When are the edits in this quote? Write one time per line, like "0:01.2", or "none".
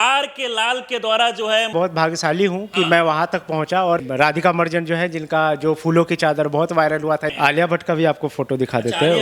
0:01.7
0:04.1
0:07.3